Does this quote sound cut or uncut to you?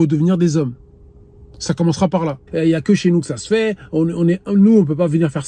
cut